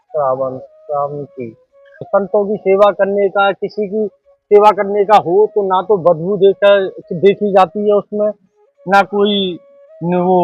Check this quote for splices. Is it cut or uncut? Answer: cut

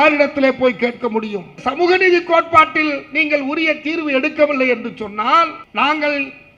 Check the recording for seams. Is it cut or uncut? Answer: cut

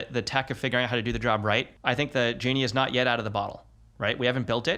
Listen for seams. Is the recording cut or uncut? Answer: cut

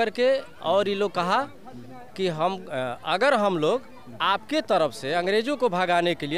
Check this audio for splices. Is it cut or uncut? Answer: uncut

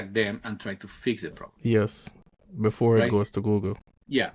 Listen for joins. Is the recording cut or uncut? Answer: uncut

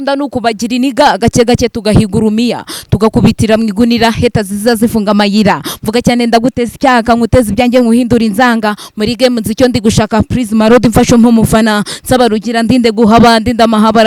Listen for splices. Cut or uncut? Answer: uncut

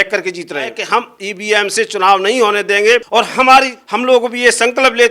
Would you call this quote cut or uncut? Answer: cut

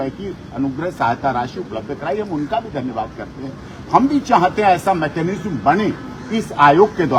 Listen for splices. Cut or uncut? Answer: uncut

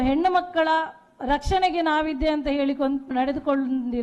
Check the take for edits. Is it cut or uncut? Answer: cut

